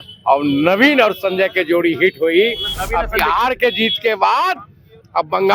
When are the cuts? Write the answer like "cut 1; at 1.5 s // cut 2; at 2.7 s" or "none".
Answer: none

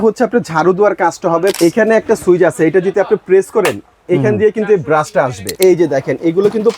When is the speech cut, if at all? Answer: cut 1; at 1.6 s // cut 2; at 5.5 s

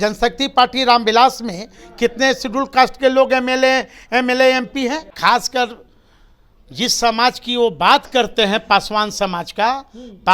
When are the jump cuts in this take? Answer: cut 1; at 5.1 s

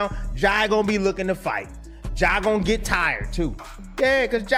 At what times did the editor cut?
none

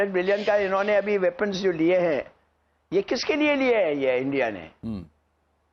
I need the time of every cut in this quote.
none

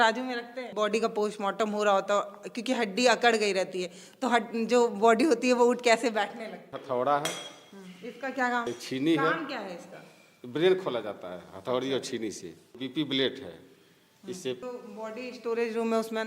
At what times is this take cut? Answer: cut 1; at 0.7 s // cut 2; at 6.7 s // cut 3; at 8.7 s // cut 4; at 12.8 s // cut 5; at 14.6 s

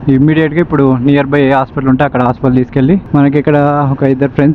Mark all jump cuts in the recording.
cut 1; at 3.0 s

